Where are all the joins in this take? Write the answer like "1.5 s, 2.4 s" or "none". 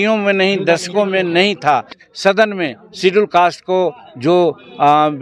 2.0 s